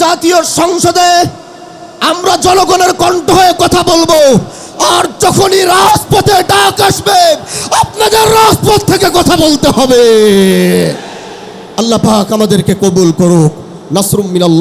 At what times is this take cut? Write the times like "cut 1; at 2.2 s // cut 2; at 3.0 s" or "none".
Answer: none